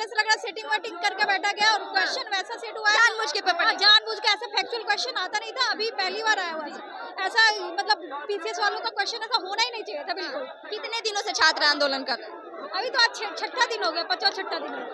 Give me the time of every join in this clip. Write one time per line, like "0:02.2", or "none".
none

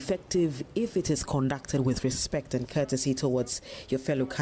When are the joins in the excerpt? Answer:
none

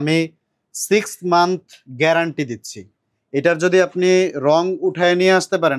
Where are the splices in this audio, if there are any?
none

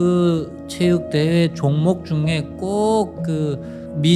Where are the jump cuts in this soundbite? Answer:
none

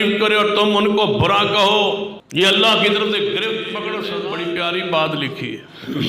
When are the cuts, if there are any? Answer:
0:02.2
0:03.9

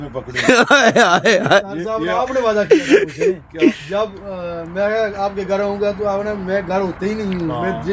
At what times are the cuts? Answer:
none

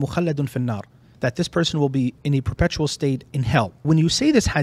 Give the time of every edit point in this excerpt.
0:01.0
0:02.2
0:03.7

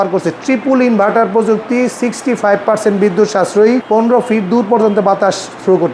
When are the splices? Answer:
0:03.8

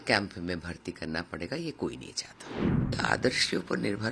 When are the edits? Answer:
0:02.9

